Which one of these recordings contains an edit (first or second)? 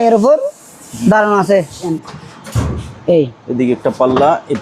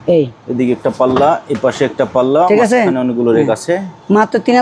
first